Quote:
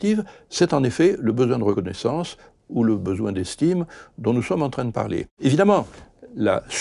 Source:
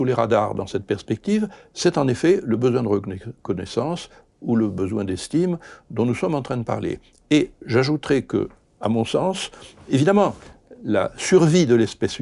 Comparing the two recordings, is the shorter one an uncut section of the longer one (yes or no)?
no